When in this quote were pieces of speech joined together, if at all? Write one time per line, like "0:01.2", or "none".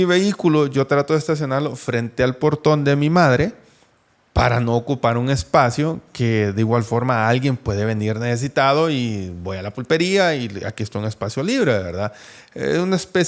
none